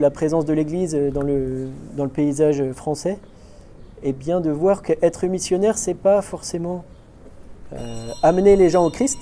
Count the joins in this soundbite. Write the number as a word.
zero